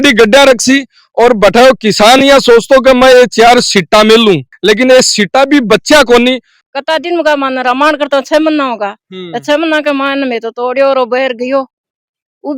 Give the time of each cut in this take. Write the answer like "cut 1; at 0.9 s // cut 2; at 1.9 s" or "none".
cut 1; at 6.5 s